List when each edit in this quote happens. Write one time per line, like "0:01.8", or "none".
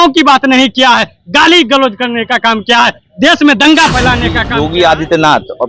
0:04.4